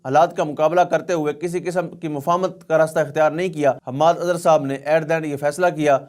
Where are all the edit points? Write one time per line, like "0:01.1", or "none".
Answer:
0:03.9